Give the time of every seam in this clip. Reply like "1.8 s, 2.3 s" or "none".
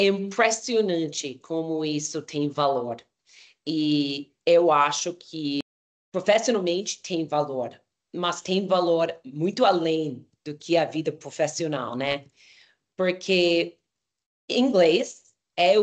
5.6 s